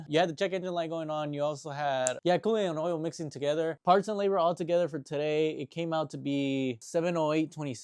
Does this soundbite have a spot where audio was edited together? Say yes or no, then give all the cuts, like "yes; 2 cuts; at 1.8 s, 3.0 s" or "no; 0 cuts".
yes; 1 cut; at 3.8 s